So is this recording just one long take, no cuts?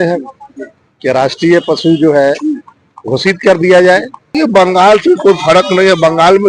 no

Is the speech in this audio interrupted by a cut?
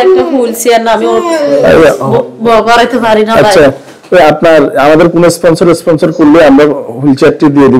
no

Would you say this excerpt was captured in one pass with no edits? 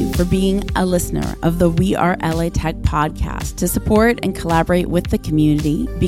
yes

